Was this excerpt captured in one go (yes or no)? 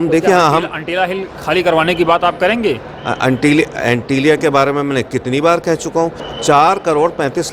no